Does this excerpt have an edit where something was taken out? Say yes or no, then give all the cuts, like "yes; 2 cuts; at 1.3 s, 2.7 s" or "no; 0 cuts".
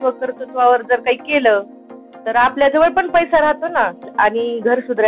yes; 1 cut; at 4.1 s